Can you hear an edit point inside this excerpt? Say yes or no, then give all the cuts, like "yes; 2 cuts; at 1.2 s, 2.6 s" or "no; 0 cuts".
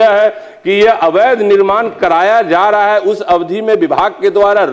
no; 0 cuts